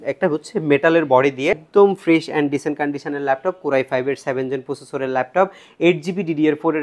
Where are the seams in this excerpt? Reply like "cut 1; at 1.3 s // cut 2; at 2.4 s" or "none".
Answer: cut 1; at 1.6 s